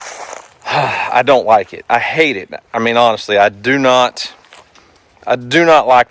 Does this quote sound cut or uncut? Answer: uncut